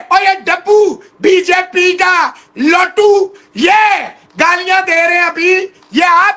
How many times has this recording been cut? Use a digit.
0